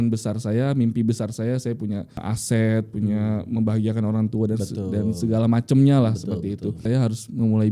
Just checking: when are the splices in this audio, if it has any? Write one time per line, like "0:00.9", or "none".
0:02.3
0:06.8

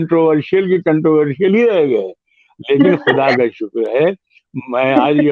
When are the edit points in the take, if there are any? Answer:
none

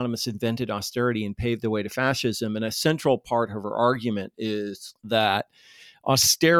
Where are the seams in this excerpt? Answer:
none

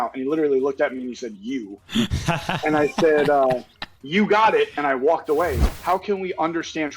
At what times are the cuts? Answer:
0:05.7

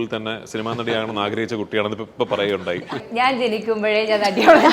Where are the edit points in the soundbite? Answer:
0:03.0

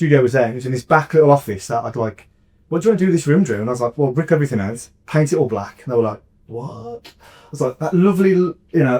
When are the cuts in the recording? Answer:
none

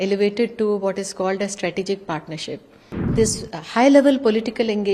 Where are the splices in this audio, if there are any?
0:03.1

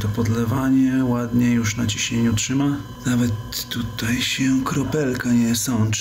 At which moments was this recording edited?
0:02.9

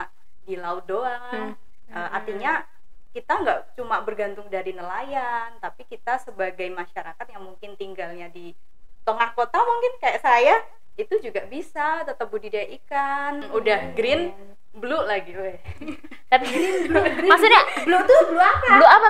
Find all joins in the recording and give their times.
0:13.4

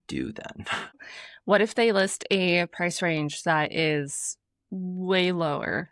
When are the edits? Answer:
0:01.1

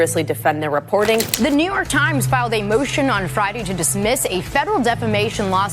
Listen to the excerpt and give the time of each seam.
0:01.3

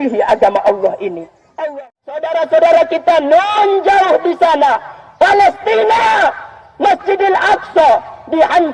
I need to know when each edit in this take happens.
0:01.6

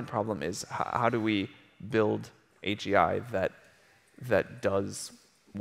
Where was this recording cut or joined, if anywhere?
none

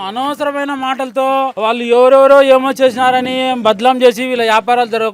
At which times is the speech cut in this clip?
0:01.5

